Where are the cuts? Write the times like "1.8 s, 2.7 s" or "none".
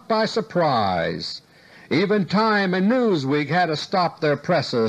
3.9 s